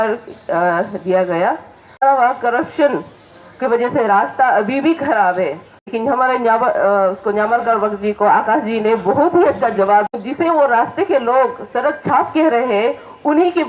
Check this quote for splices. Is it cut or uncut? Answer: cut